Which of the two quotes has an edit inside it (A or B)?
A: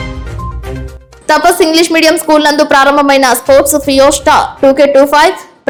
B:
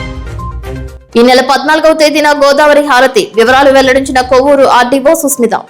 B